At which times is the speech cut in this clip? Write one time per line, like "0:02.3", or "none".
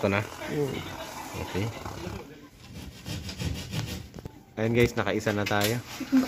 0:02.4

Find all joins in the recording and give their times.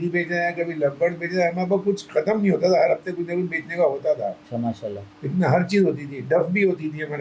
none

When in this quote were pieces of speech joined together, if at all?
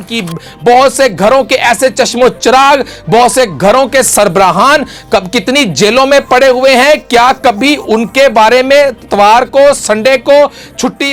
none

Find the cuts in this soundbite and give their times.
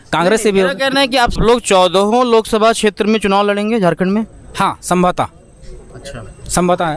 0:01.4

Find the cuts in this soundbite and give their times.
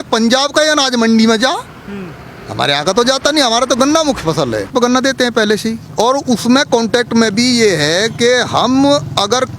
0:04.7

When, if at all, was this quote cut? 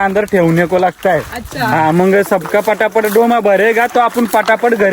0:02.3

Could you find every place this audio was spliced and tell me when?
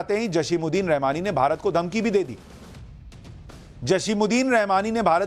none

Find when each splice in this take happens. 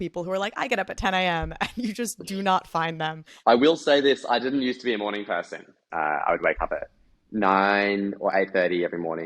0:03.4
0:05.8

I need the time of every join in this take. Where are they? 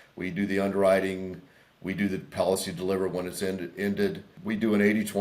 0:04.3

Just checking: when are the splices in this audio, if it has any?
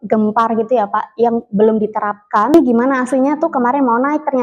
0:02.5

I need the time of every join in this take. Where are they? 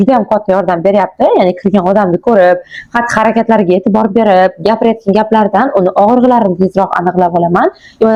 none

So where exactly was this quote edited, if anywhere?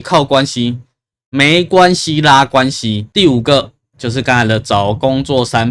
0:03.0

